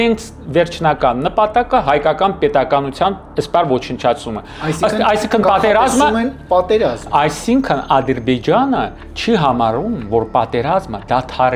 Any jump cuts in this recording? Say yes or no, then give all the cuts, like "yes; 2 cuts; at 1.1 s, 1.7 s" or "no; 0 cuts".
no; 0 cuts